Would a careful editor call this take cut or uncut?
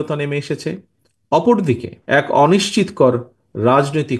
cut